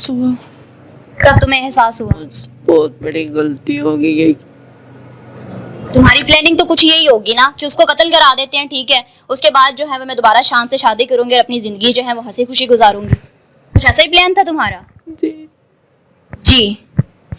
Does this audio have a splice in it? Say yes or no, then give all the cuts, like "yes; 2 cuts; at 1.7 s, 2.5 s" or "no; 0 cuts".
no; 0 cuts